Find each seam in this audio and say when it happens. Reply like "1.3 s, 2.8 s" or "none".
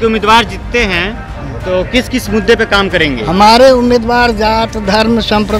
none